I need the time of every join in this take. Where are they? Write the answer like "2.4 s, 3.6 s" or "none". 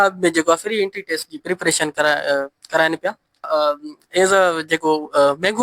3.5 s